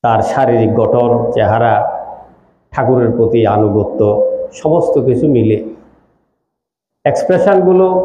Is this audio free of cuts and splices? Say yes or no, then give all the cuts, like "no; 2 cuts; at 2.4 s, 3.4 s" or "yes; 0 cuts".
yes; 0 cuts